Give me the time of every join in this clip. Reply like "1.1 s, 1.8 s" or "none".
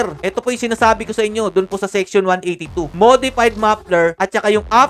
none